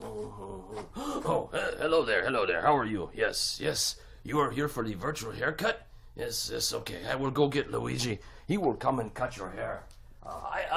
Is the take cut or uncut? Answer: uncut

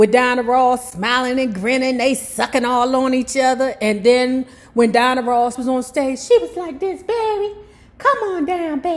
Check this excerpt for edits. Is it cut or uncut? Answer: uncut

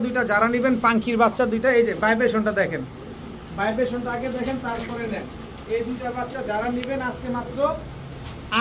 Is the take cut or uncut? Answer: uncut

